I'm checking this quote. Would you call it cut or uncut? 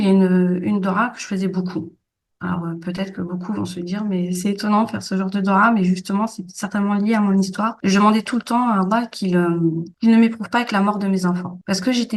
uncut